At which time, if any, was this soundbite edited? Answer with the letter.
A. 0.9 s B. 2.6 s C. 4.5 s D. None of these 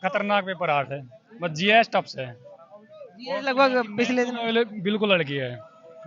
D